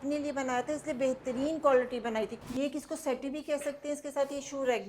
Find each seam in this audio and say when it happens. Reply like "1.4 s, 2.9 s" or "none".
2.4 s